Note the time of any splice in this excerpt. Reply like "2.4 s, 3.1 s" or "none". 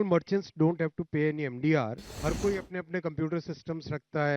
2.1 s